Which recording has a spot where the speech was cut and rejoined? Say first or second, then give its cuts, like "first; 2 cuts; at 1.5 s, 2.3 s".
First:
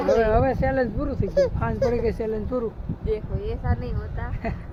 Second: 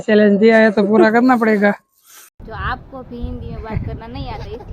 second; 1 cut; at 2.4 s